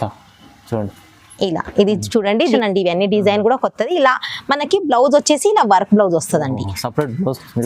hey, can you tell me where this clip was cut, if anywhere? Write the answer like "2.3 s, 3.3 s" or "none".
2.5 s